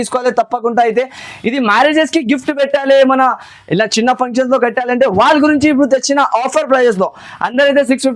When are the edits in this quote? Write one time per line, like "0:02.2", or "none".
none